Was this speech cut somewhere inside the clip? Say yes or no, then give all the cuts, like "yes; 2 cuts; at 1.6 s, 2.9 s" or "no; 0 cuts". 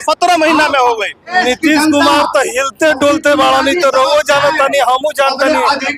yes; 1 cut; at 1.3 s